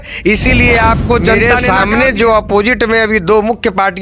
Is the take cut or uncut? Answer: cut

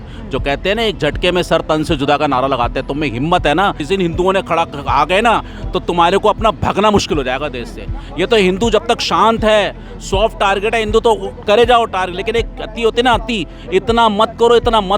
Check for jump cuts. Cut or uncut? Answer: cut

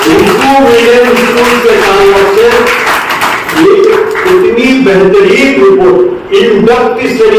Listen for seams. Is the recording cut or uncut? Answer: uncut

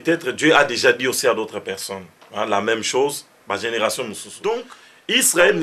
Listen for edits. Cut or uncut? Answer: cut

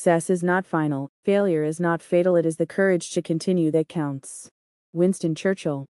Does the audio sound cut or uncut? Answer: uncut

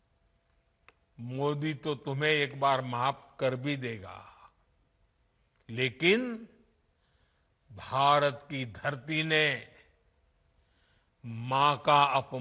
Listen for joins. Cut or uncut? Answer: uncut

